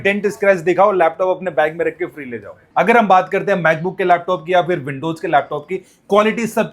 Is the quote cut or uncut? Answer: cut